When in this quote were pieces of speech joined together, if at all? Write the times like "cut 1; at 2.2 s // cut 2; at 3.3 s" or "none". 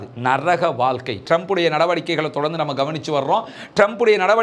cut 1; at 1.2 s